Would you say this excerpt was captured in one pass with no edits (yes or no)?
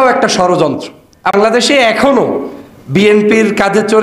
no